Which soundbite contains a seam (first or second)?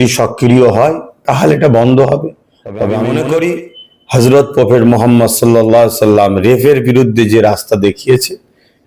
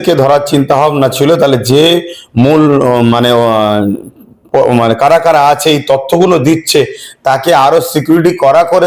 first